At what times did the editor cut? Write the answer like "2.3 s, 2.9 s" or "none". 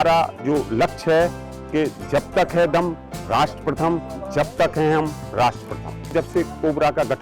6.1 s